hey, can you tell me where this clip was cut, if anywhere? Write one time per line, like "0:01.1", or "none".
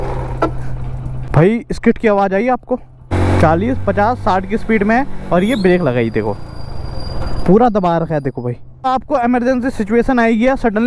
0:01.2
0:03.1
0:08.9